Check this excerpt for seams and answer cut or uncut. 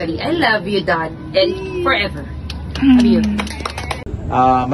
cut